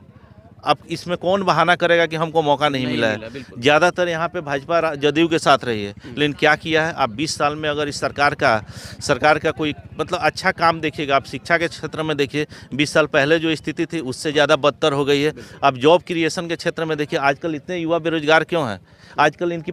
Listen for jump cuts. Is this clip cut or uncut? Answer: uncut